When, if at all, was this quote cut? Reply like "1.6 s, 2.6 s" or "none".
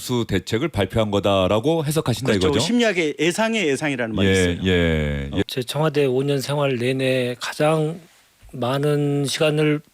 5.5 s